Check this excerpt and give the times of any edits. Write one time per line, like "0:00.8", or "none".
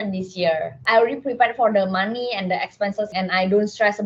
0:00.8
0:03.1